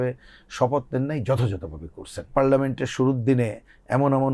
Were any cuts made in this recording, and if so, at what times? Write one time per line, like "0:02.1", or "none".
0:02.3